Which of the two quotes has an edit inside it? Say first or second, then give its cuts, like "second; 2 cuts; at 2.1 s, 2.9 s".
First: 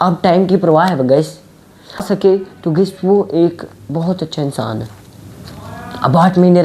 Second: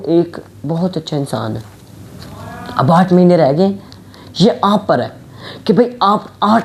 first; 1 cut; at 2.0 s